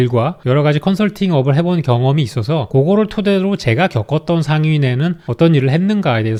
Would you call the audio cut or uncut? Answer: uncut